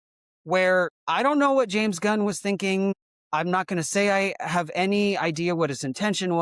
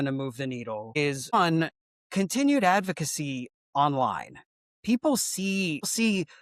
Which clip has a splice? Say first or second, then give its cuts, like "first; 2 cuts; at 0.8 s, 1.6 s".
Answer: first; 1 cut; at 1.0 s